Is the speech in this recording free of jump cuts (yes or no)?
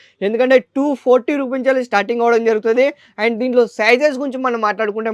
yes